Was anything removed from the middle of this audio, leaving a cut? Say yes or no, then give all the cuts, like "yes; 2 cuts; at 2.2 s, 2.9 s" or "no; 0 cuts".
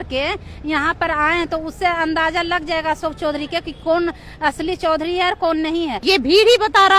yes; 1 cut; at 6.0 s